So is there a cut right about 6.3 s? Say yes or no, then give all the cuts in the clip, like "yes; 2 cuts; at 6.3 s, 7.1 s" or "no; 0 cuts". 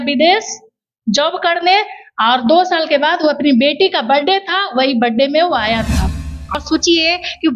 yes; 1 cut; at 6.3 s